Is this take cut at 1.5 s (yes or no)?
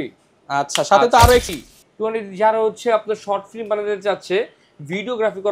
yes